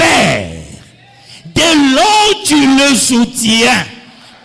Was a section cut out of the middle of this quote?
no; 0 cuts

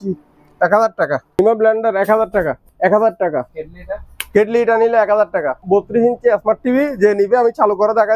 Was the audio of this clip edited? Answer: yes; 4 cuts; at 1.4 s, 2.6 s, 3.5 s, 5.6 s

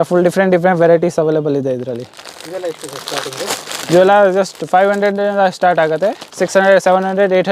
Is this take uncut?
yes; 0 cuts

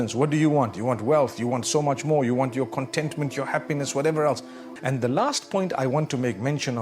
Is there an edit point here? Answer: yes; 1 cut; at 4.6 s

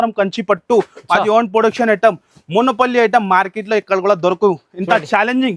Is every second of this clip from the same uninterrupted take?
yes; 0 cuts

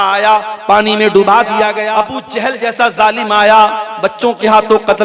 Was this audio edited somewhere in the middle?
yes; 1 cut; at 1.8 s

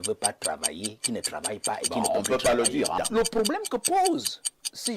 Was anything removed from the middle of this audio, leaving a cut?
yes; 1 cut; at 3.0 s

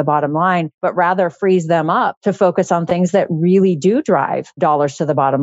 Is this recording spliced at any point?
yes; 1 cut; at 4.5 s

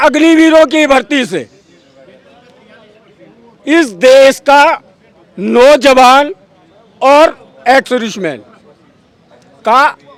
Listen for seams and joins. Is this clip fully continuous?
yes; 0 cuts

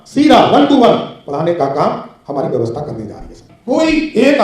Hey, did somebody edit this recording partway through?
yes; 1 cut; at 3.5 s

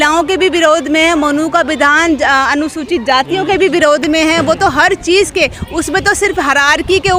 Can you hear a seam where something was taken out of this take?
no; 0 cuts

